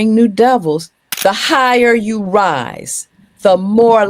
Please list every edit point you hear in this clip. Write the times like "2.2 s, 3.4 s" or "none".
1.0 s